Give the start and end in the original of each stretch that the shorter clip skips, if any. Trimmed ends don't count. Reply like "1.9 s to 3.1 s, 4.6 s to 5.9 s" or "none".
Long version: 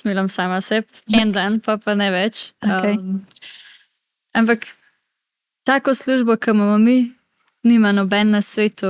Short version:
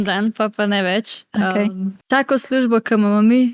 3.3 s to 5.5 s